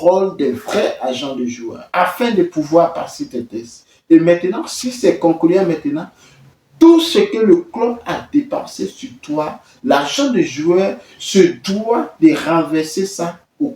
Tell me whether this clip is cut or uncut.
cut